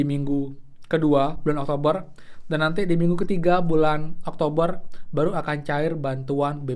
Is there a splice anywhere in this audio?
no; 0 cuts

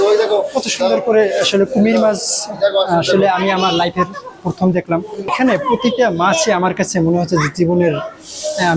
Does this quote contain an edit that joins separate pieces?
yes; 1 cut; at 5.3 s

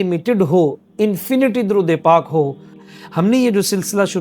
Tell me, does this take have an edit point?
yes; 1 cut; at 2.9 s

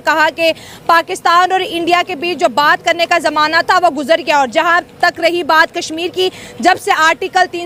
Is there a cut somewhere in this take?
no; 0 cuts

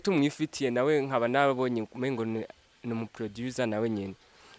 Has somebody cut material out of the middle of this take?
no; 0 cuts

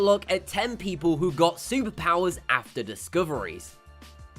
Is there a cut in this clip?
yes; 1 cut; at 2.6 s

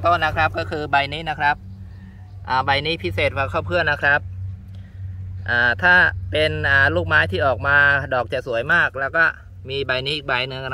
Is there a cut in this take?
no; 0 cuts

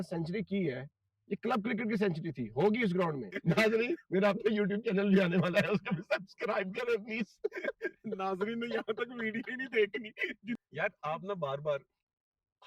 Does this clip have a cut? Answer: yes; 2 cuts; at 3.3 s, 10.6 s

